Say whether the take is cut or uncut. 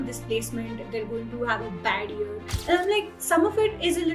cut